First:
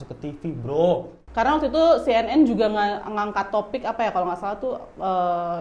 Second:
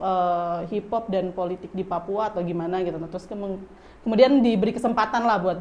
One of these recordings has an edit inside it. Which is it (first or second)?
first